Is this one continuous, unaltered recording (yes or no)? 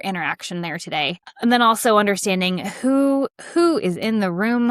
yes